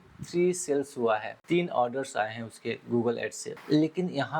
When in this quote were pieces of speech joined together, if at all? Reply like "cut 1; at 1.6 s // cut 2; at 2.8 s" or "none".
cut 1; at 1.4 s // cut 2; at 3.5 s